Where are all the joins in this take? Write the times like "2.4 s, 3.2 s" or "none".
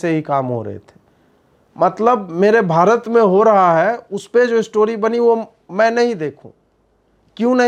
none

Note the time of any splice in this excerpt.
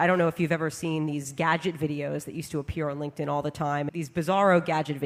3.9 s

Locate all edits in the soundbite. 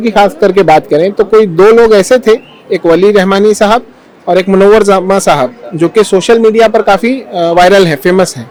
none

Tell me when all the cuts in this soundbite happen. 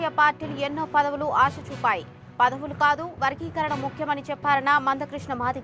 none

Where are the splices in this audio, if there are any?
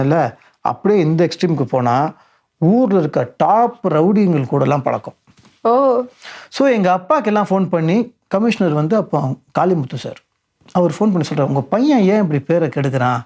none

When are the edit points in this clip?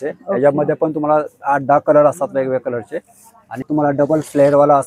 3.6 s

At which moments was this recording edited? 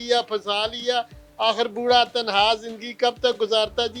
none

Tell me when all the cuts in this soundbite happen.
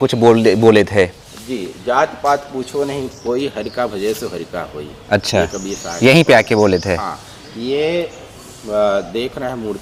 none

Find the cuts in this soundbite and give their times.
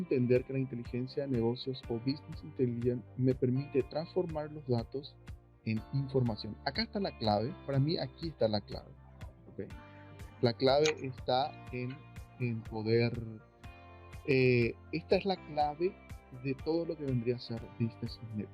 none

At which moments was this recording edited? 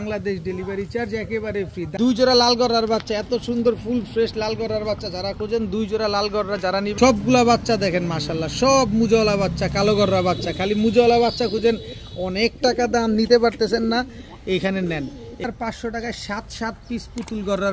1.9 s, 6.9 s, 15.4 s

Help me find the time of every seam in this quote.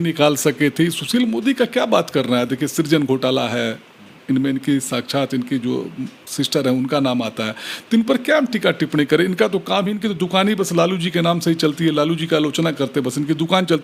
none

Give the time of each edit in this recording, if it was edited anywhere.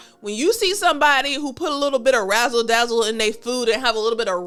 none

